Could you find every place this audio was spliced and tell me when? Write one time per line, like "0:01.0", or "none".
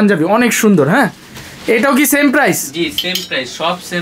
none